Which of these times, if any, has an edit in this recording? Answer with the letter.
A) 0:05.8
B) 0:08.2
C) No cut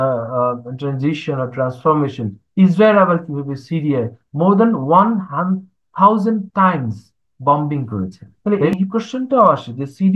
B